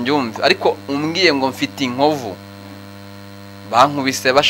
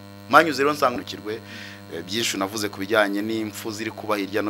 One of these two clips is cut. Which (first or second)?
second